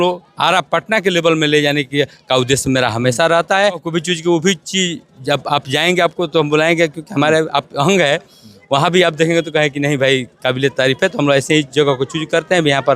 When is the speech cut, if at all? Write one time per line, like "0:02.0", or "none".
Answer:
0:03.9